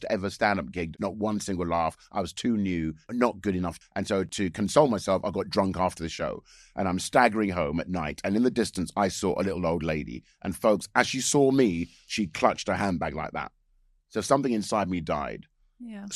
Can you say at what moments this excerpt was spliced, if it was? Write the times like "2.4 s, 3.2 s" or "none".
0.9 s, 3.8 s